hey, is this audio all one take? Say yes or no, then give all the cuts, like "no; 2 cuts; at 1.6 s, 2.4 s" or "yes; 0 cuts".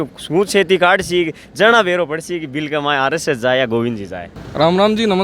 yes; 0 cuts